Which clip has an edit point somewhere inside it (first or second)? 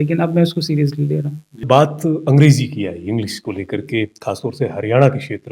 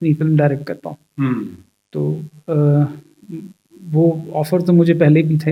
first